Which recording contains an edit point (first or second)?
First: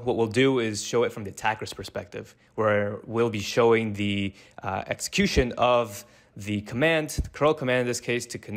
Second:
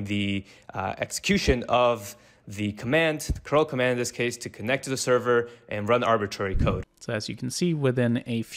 second